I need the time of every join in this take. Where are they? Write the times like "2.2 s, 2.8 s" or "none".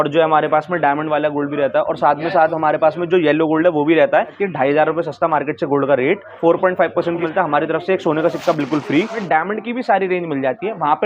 4.4 s, 6.3 s, 7.2 s, 9.2 s